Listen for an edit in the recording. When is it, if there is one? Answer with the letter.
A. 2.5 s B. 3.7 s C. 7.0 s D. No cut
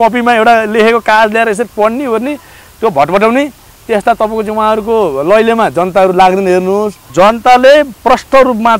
C